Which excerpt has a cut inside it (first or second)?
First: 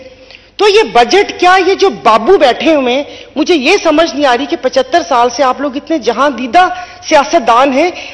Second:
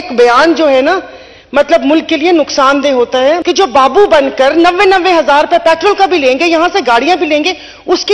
second